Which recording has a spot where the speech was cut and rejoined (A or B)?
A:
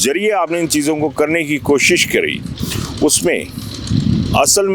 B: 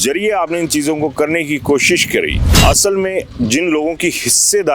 B